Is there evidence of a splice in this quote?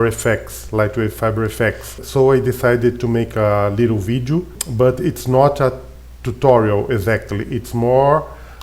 yes; 2 cuts; at 2.0 s, 4.6 s

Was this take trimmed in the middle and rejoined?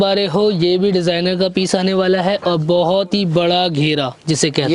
no; 0 cuts

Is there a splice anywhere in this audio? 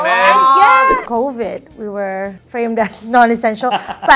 yes; 2 cuts; at 1.0 s, 2.4 s

